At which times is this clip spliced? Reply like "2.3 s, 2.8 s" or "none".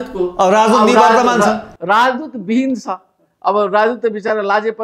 none